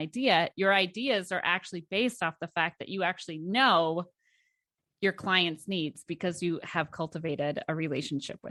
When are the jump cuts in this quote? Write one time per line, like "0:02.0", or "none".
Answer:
none